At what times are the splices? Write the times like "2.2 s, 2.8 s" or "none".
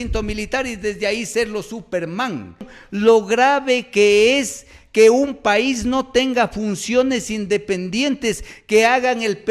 2.8 s